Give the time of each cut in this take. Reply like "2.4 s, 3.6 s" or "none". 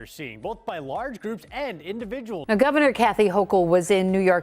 2.4 s